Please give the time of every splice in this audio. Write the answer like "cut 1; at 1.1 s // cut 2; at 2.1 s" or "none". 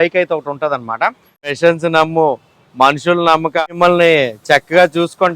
cut 1; at 1.5 s // cut 2; at 3.6 s